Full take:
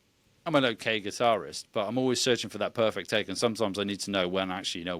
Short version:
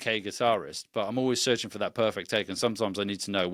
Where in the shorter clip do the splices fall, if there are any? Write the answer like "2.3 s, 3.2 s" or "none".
none